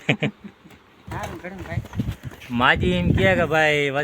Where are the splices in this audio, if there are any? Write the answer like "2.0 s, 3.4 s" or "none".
1.1 s